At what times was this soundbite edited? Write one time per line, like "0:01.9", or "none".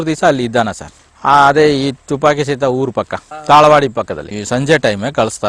none

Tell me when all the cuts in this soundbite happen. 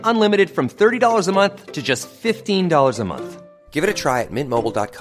none

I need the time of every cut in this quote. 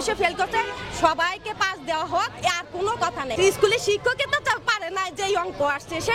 0:03.3

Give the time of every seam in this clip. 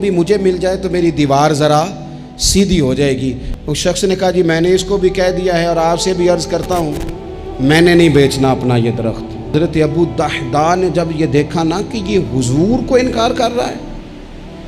0:03.5
0:09.5

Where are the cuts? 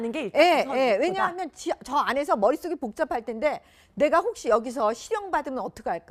0:01.8

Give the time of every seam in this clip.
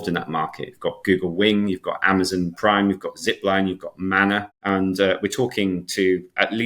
0:04.5

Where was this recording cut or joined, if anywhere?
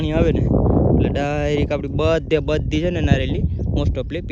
none

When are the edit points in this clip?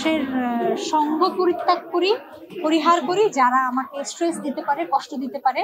none

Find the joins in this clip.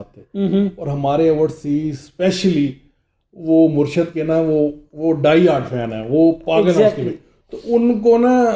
none

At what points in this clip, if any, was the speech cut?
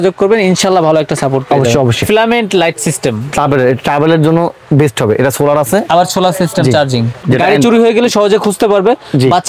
0:02.0
0:07.2

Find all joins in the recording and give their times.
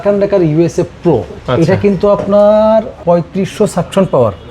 0:01.4

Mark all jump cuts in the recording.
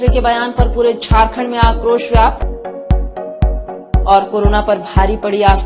none

